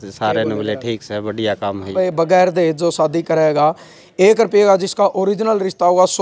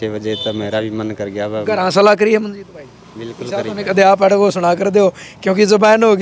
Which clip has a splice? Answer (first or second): first